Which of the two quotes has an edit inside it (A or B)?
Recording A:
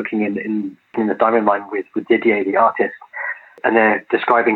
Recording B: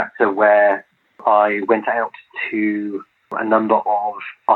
B